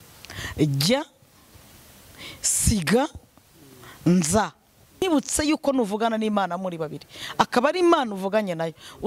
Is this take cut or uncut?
cut